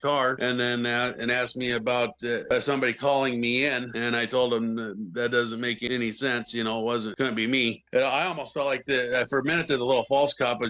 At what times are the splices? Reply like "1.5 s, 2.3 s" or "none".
none